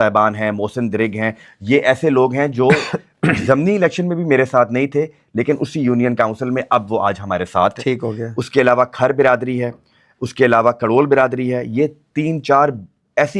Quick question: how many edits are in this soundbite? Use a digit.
0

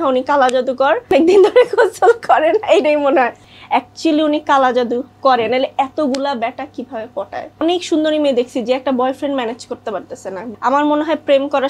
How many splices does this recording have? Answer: 4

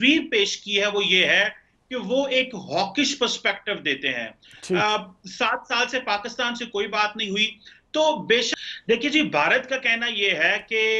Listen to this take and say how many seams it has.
1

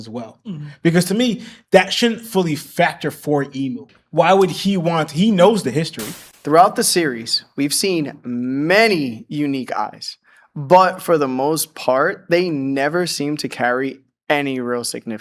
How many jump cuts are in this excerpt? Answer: 1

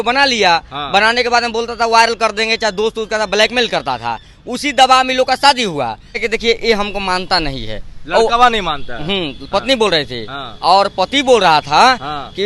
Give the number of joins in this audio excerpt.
1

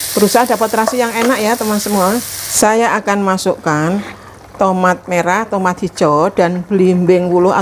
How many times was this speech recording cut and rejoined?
1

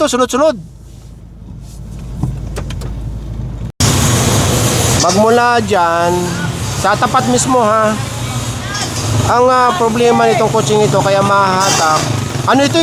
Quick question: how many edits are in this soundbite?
0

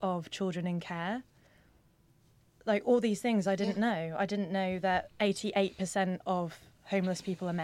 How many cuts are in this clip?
0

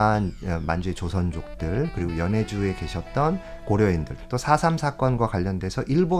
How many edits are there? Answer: 1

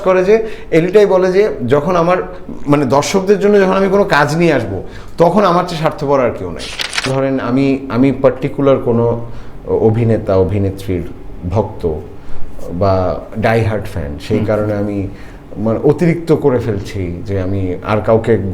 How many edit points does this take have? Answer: 1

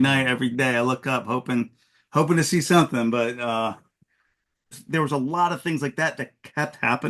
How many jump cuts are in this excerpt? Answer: 1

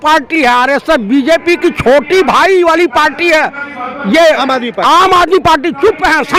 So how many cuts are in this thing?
0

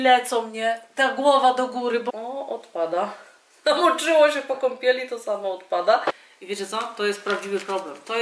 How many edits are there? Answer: 2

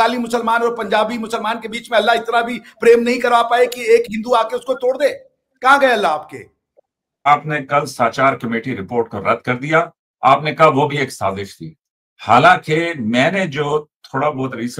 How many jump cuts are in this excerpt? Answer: 1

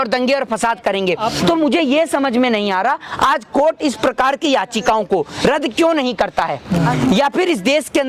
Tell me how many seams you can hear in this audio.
1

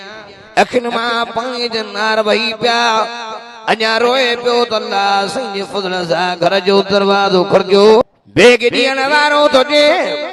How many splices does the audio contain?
1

